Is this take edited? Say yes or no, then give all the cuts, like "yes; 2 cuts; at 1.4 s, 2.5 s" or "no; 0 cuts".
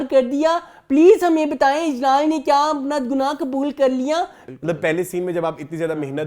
yes; 1 cut; at 4.4 s